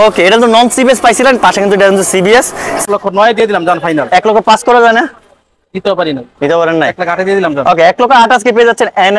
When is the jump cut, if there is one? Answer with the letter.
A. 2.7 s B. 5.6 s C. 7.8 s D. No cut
A